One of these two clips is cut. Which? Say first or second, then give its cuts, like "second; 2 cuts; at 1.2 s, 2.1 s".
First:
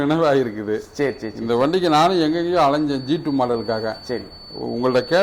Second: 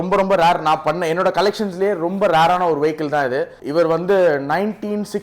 second; 1 cut; at 3.6 s